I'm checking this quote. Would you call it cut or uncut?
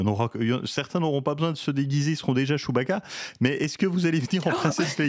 uncut